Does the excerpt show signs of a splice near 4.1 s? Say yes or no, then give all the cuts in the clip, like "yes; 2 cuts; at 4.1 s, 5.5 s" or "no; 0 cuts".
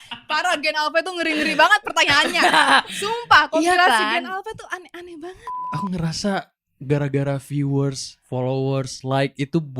no; 1 cut; at 5.5 s